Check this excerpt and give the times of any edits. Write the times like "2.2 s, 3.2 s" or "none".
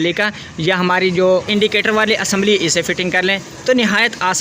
1.5 s